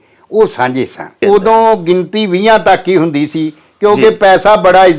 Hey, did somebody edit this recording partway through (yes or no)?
yes